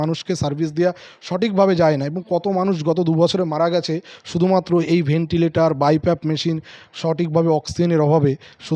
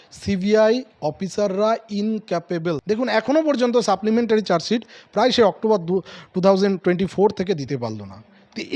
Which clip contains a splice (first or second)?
second